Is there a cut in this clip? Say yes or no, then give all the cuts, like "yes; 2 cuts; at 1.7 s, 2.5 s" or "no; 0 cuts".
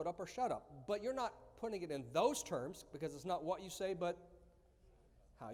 no; 0 cuts